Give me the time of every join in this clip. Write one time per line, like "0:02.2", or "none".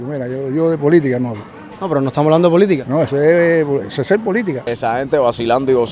0:04.7